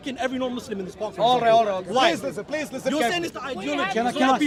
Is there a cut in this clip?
no; 0 cuts

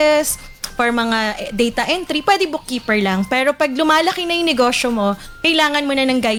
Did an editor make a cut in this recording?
no; 0 cuts

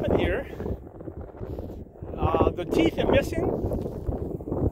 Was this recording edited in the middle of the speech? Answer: no; 0 cuts

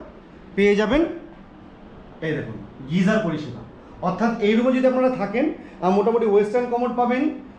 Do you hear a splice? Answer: no; 0 cuts

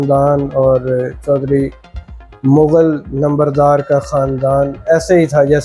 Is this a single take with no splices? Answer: yes; 0 cuts

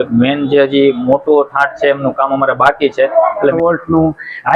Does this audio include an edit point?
yes; 1 cut; at 3.5 s

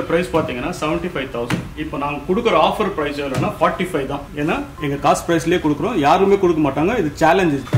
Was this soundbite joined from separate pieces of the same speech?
no; 0 cuts

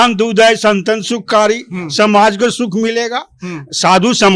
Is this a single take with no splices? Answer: yes; 0 cuts

